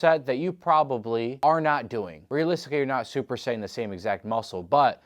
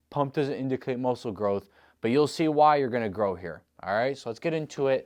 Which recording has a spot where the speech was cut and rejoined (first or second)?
first